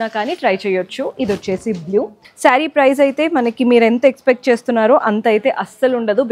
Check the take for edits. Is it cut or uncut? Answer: cut